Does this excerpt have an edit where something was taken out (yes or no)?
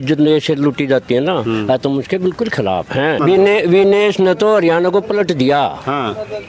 yes